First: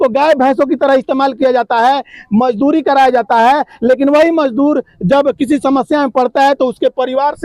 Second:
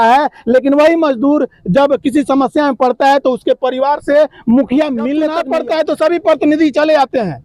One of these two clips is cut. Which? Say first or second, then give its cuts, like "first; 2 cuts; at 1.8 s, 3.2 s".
second; 1 cut; at 5.4 s